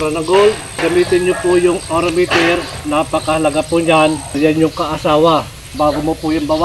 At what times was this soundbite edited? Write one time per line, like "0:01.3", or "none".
0:00.8
0:04.4
0:05.7